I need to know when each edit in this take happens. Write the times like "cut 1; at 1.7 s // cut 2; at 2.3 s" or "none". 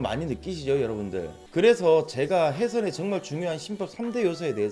cut 1; at 1.4 s